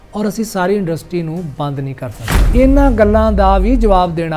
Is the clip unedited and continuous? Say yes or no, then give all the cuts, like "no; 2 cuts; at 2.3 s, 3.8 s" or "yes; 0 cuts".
no; 1 cut; at 2.3 s